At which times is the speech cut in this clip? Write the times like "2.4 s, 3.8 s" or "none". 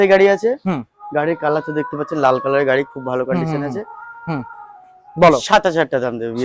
none